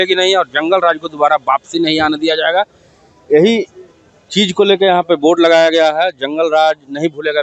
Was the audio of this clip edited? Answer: no; 0 cuts

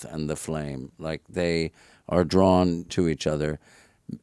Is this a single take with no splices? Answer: no; 1 cut; at 2.9 s

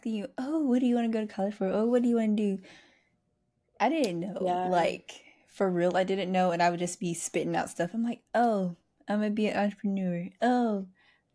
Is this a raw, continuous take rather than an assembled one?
yes; 0 cuts

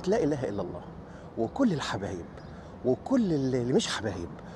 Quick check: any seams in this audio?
no; 0 cuts

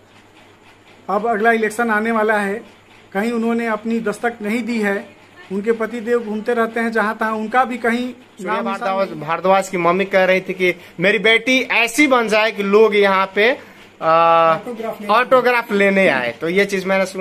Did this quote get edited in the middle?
yes; 1 cut; at 8.7 s

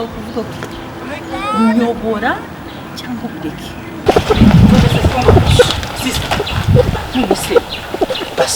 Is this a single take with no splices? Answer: no; 1 cut; at 4.0 s

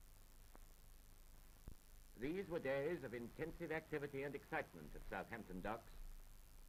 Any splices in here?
no; 0 cuts

